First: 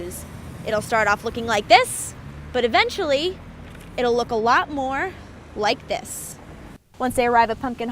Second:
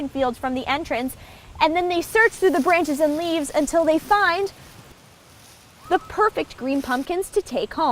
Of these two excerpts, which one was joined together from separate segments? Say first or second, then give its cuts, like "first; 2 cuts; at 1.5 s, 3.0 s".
first; 1 cut; at 6.8 s